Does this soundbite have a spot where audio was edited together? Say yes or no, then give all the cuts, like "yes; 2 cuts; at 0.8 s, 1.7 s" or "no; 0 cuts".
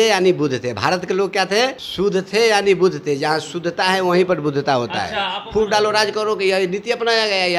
yes; 2 cuts; at 1.8 s, 5.4 s